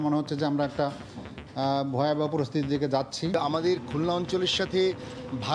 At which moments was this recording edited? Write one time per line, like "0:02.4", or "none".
0:03.5

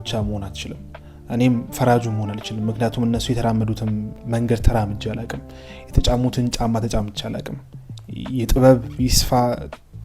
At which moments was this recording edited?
0:04.2

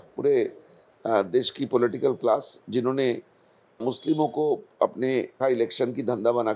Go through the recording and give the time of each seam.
0:05.3

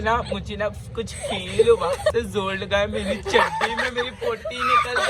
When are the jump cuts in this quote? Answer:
0:02.1

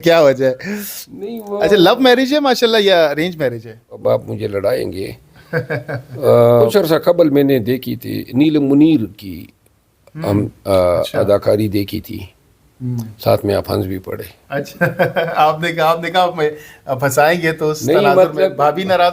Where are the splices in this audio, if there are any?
0:04.0
0:06.7

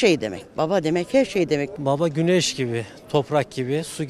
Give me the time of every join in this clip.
0:01.7

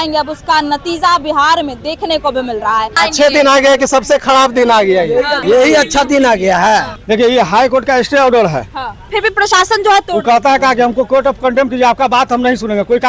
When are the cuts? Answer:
0:03.0
0:05.4
0:06.9
0:09.1

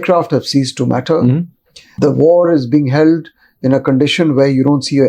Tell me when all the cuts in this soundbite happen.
0:01.9

